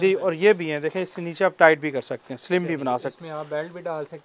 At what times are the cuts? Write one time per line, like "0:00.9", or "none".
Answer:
none